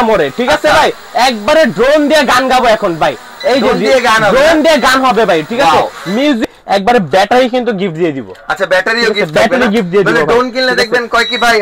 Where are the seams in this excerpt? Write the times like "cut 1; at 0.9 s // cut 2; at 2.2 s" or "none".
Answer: cut 1; at 6.4 s